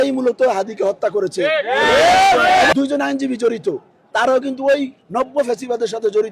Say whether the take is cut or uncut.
cut